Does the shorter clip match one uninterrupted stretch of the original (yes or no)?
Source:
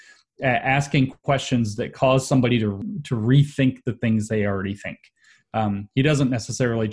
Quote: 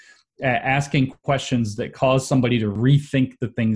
no